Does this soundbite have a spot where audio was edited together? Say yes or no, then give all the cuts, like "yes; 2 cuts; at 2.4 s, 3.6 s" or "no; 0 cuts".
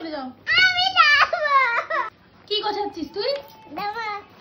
no; 0 cuts